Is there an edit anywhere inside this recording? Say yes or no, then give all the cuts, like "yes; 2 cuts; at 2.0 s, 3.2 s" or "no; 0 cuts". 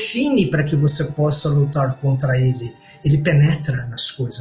yes; 1 cut; at 2.9 s